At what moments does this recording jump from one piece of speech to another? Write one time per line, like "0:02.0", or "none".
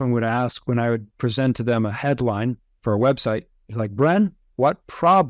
none

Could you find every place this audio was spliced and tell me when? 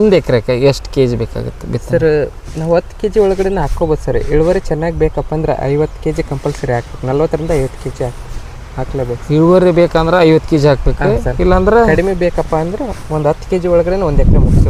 none

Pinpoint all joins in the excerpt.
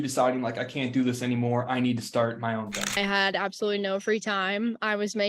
0:02.8

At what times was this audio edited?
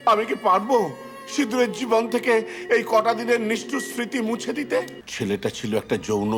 0:05.0

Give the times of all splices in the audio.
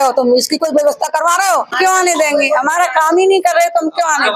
0:01.8

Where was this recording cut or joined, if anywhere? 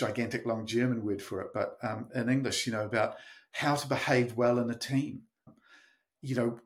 0:05.5

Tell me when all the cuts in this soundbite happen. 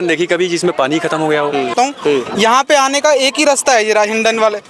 0:01.7

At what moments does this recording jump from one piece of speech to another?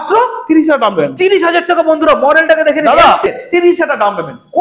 0:03.3

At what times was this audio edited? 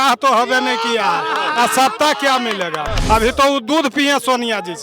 0:02.9

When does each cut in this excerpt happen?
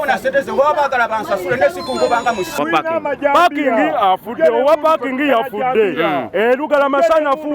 0:02.6

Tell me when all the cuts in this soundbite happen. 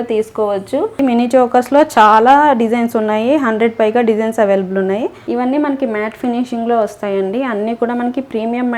0:01.0
0:05.2

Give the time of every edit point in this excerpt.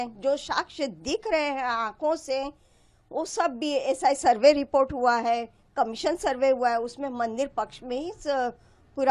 none

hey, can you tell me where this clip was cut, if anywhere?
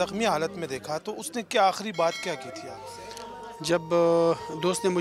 none

